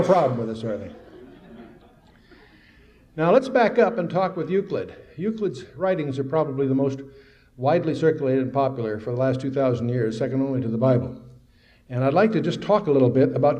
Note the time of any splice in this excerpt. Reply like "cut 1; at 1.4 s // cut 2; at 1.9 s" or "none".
cut 1; at 7.6 s